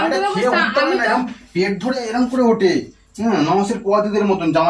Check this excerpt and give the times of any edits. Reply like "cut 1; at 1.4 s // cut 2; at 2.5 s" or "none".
none